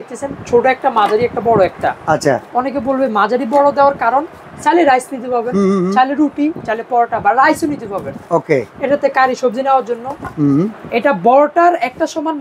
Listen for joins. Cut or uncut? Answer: uncut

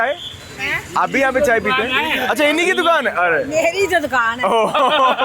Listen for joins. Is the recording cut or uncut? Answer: uncut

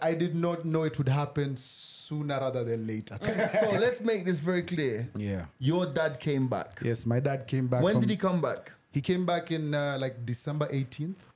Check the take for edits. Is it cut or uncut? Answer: cut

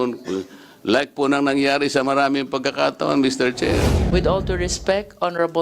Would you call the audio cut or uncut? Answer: cut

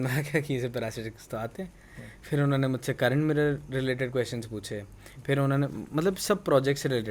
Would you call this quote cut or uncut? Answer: uncut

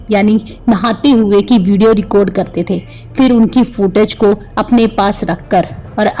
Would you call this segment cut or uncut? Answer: uncut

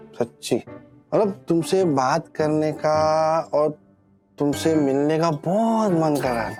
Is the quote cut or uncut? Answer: uncut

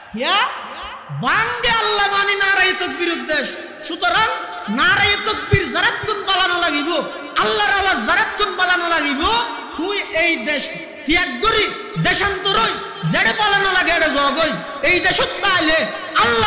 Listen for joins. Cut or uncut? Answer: uncut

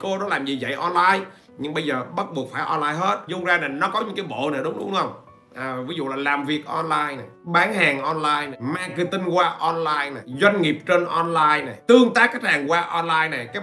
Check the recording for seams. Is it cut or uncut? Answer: cut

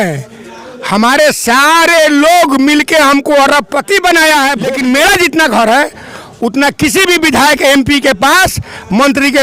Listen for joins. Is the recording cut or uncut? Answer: cut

